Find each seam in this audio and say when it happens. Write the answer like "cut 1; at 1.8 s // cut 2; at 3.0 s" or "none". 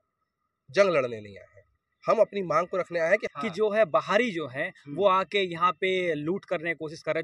cut 1; at 3.3 s